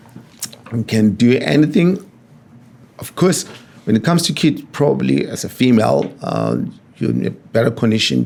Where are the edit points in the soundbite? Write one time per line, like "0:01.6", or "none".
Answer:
none